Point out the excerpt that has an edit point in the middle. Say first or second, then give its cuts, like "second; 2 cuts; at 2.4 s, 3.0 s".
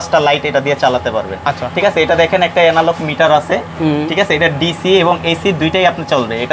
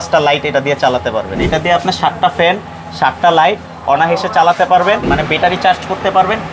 second; 2 cuts; at 1.4 s, 5.0 s